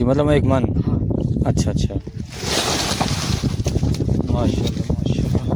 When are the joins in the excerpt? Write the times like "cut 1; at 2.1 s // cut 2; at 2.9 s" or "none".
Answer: cut 1; at 2.1 s